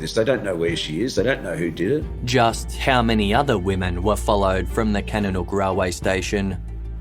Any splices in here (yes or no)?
no